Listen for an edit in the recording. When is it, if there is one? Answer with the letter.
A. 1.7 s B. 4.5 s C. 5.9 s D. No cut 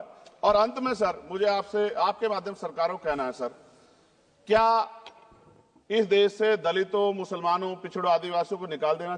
D